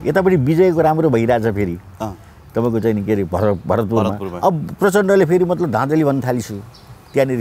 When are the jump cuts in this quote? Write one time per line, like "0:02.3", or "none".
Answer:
none

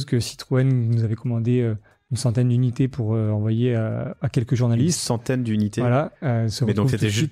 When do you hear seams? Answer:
0:04.2

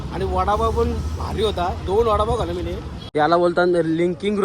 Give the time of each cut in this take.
0:02.9

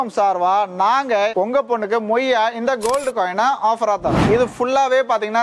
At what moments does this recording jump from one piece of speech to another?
0:04.2

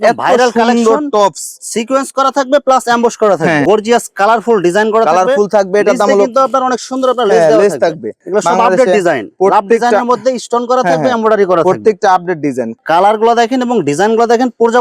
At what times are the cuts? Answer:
0:03.6
0:08.2
0:12.8

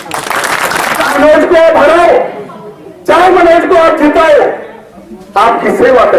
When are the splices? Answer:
0:01.2

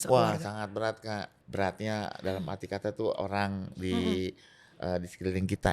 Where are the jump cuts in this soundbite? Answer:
0:01.4
0:03.2

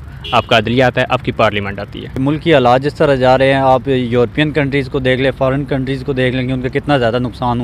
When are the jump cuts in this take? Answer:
0:02.2

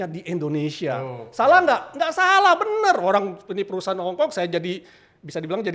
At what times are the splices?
none

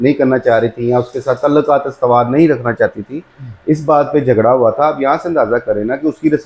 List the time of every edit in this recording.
none

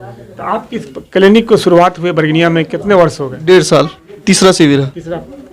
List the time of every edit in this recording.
0:04.2

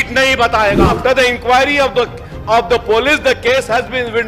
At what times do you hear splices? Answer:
0:00.9

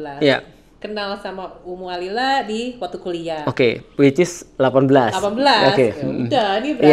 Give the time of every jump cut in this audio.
none

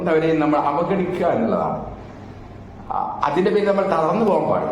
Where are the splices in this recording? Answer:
none

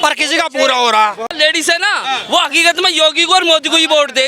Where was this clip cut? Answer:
0:01.2

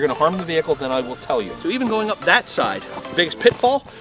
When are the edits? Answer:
0:01.5

